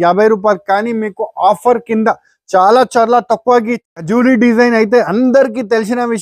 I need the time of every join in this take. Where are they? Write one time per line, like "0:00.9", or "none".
0:03.8